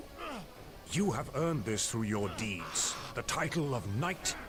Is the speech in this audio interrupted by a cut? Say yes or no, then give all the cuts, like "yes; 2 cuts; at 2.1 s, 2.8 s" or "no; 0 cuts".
no; 0 cuts